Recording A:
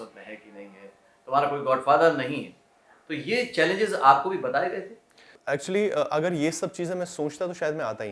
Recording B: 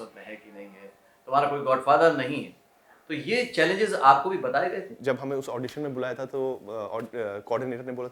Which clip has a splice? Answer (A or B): B